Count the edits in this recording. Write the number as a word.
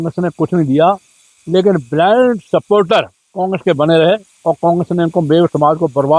two